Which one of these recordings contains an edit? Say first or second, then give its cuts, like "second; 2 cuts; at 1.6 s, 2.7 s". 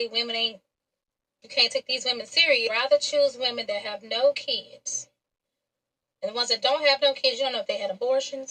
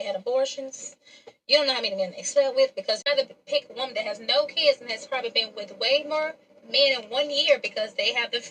second; 1 cut; at 3.1 s